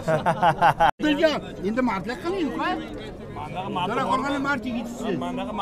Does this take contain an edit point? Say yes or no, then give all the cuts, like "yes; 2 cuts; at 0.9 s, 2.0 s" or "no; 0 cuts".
yes; 1 cut; at 1.0 s